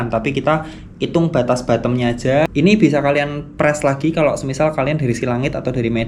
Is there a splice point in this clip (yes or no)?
yes